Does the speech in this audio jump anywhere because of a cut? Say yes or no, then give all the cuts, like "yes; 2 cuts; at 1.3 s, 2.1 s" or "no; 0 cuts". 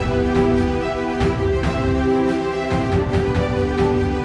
no; 0 cuts